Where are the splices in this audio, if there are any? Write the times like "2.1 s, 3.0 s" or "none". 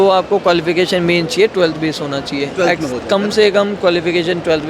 none